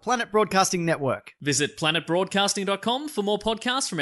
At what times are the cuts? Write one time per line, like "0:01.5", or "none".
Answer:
none